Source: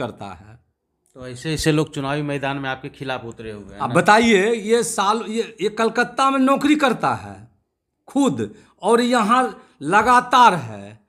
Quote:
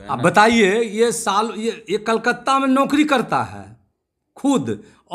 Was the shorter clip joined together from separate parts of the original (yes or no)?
no